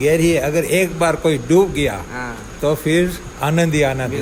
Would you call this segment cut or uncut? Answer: uncut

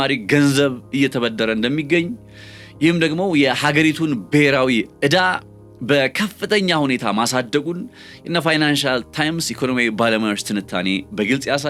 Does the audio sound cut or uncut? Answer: uncut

